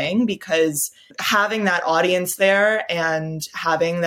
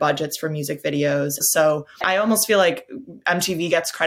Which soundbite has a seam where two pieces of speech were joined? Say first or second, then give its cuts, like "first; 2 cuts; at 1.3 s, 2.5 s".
second; 1 cut; at 1.6 s